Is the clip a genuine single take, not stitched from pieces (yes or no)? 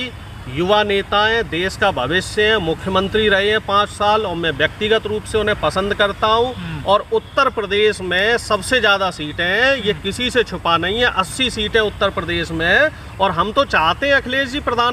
yes